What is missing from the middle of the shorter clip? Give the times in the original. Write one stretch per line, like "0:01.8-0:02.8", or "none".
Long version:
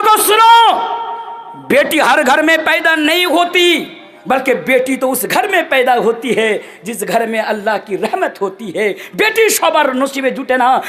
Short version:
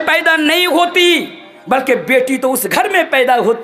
none